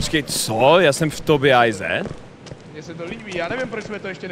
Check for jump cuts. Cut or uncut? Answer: uncut